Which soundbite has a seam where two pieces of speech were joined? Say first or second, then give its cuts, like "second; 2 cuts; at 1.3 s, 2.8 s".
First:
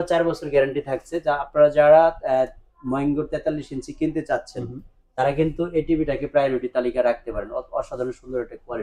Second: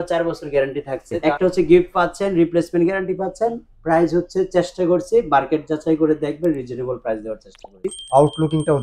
second; 2 cuts; at 1.2 s, 7.9 s